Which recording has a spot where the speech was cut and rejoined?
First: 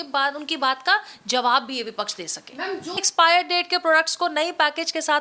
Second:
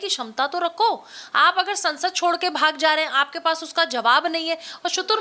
first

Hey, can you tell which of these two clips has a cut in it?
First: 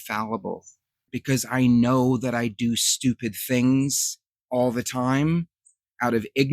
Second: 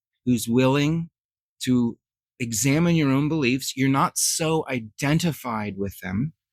first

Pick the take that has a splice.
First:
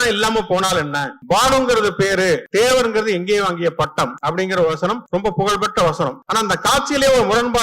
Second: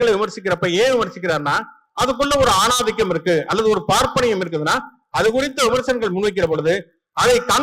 first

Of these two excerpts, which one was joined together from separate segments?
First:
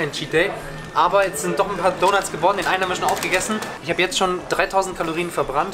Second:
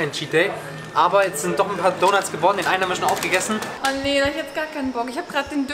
second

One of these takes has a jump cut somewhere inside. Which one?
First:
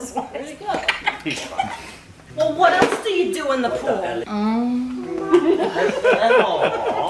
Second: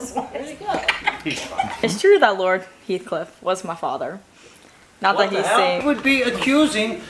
second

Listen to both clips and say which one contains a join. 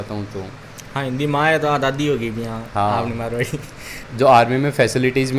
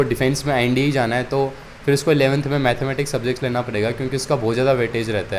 first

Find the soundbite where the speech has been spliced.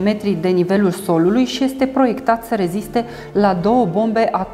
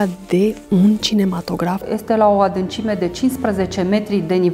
second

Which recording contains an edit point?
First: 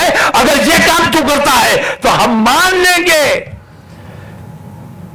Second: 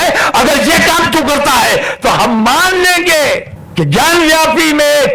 second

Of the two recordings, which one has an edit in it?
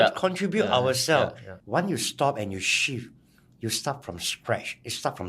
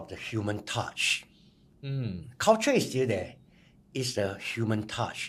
first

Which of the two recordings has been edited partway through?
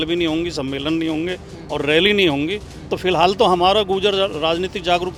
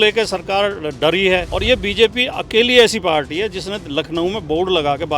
second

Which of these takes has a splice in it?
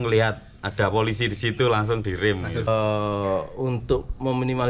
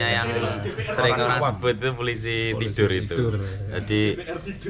first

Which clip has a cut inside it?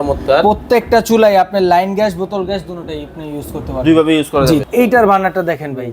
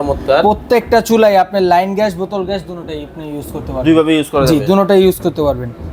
first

